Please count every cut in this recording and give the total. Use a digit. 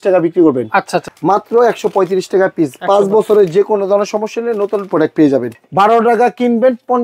2